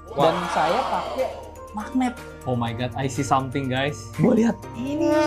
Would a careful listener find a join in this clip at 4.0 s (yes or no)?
yes